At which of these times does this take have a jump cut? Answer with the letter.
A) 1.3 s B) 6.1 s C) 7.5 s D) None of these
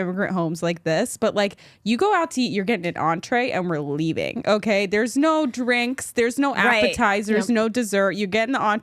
D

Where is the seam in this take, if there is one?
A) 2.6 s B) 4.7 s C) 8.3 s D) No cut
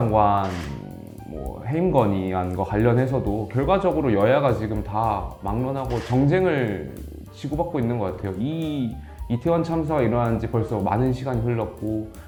D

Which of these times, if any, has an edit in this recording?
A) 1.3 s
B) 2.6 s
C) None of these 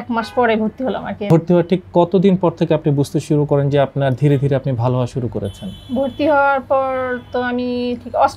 A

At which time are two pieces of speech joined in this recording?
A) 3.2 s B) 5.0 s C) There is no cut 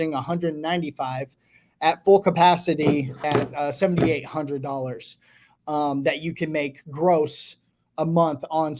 A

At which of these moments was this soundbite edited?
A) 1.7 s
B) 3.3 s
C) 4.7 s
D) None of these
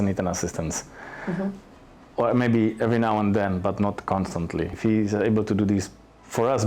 C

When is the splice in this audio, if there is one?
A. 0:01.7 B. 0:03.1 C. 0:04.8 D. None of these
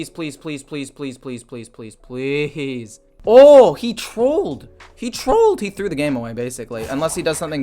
B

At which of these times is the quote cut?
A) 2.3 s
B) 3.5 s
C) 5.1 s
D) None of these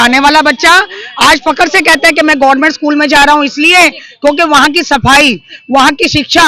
A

